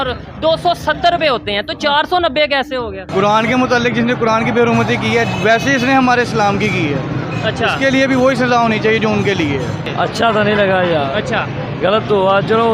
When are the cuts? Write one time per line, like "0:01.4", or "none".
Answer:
0:03.0
0:09.8